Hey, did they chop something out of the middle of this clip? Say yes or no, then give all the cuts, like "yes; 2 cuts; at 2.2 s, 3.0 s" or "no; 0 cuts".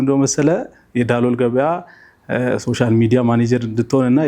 no; 0 cuts